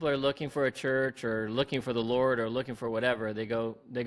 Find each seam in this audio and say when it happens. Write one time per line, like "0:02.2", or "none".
none